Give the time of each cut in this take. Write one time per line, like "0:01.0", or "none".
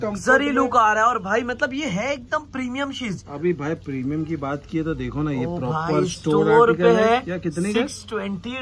none